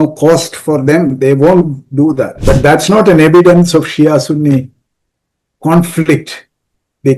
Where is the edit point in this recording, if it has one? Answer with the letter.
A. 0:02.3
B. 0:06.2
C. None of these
A